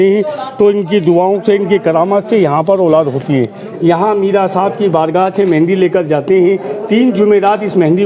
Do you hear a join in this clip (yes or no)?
yes